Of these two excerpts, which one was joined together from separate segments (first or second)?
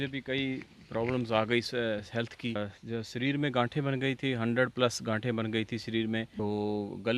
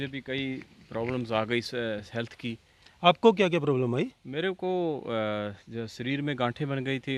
first